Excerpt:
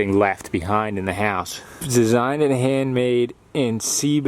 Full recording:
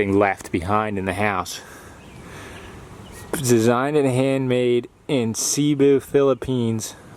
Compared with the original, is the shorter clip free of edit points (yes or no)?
no